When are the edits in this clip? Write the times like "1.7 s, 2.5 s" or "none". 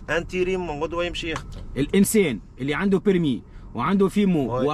none